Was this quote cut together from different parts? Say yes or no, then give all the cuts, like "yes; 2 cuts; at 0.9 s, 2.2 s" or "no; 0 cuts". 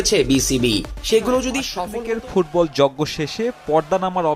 yes; 1 cut; at 1.7 s